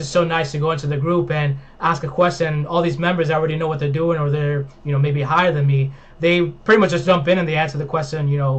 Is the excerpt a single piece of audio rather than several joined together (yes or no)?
yes